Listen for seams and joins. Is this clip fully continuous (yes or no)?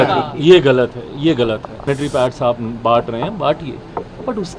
no